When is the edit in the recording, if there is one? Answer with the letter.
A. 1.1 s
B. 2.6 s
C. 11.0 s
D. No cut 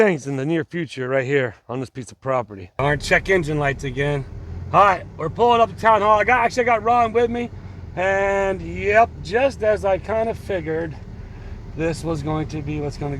B